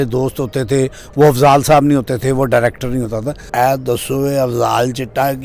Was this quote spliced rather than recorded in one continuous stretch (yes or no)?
yes